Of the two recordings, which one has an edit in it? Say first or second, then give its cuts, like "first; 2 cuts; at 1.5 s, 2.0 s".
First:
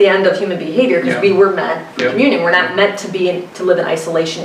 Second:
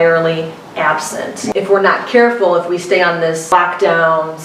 second; 2 cuts; at 1.5 s, 3.5 s